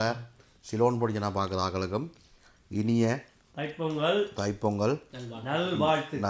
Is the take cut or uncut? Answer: uncut